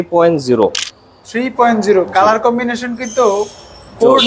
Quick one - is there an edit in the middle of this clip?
no; 0 cuts

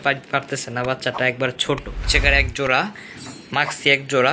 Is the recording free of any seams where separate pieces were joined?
no; 1 cut; at 2.0 s

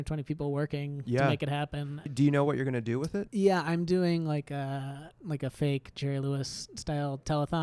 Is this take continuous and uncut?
no; 1 cut; at 2.1 s

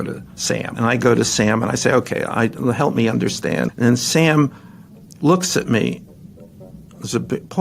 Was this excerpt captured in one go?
no; 2 cuts; at 0.8 s, 3.7 s

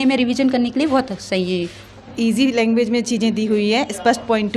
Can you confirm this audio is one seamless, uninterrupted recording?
no; 1 cut; at 2.1 s

